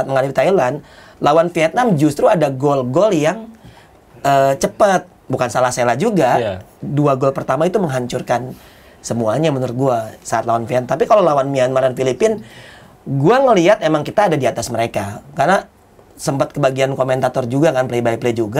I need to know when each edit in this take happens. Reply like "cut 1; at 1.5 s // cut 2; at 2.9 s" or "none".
none